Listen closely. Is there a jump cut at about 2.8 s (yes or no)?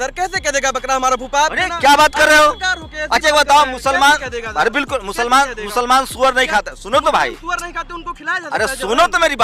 no